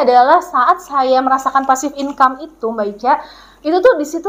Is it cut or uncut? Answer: uncut